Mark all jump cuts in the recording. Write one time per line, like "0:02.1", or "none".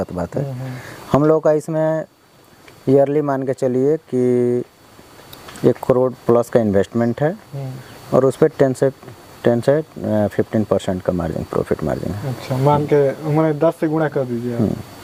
none